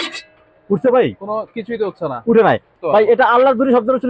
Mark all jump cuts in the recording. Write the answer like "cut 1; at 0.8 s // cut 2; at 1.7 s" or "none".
cut 1; at 2.7 s